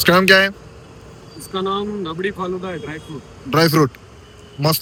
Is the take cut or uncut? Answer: uncut